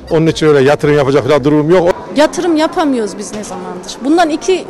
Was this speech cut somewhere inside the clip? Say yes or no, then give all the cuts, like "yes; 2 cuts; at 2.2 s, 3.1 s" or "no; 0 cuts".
yes; 1 cut; at 1.9 s